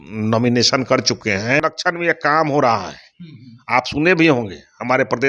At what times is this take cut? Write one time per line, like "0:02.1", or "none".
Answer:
0:01.6